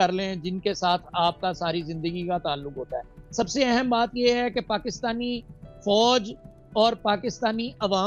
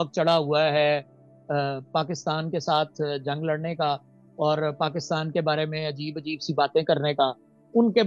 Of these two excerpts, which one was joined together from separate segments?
first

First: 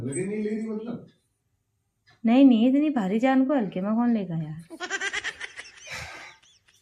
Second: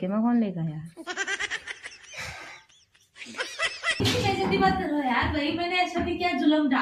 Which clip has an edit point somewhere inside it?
second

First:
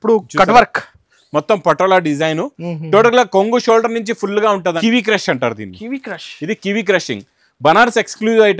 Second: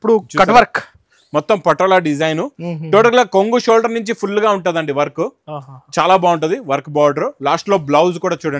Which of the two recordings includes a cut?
first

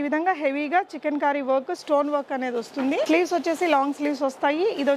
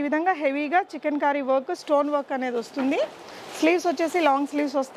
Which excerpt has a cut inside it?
first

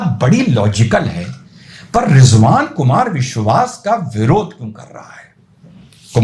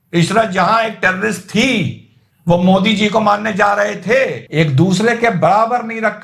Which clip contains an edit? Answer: second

